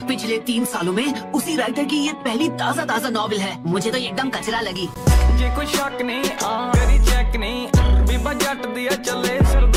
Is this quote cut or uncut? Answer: uncut